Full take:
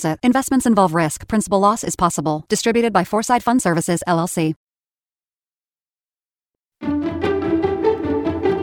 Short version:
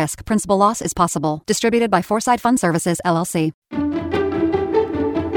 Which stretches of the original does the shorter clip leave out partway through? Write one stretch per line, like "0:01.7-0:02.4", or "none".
0:04.6-0:06.7

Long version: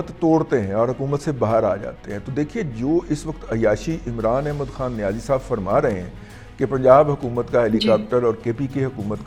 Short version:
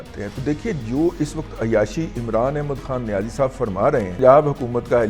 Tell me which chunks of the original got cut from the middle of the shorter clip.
0:06.1-0:06.8

